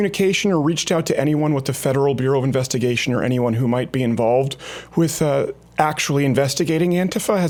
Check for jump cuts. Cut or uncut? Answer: uncut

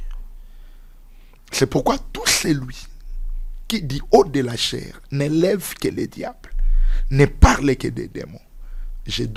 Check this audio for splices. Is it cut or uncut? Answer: uncut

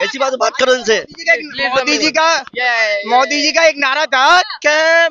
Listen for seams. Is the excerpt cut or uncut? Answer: uncut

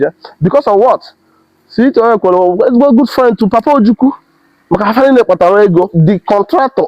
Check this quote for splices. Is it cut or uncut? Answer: cut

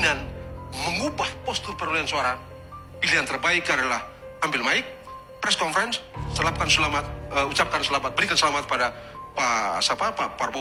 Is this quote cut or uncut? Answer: uncut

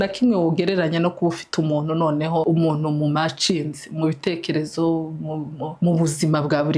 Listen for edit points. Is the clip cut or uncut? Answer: cut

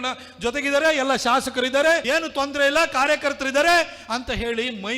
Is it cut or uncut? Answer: cut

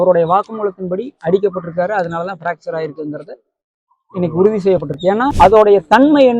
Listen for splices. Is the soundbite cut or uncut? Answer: cut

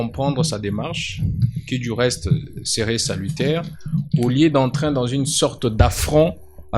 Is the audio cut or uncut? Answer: uncut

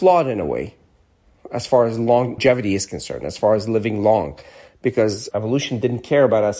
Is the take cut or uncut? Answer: cut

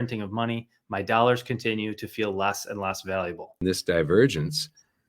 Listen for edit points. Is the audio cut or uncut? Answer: cut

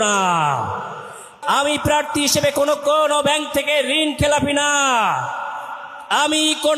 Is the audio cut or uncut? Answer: cut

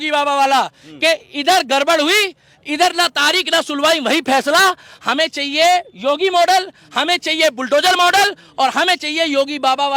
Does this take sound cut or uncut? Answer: uncut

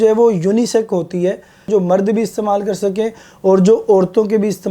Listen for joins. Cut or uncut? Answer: cut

